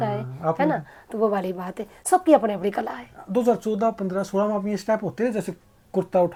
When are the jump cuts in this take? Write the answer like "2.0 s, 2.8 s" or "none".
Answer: none